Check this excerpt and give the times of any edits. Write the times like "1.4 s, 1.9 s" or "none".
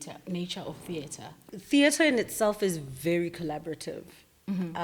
1.4 s